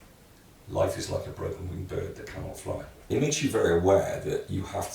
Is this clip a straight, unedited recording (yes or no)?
no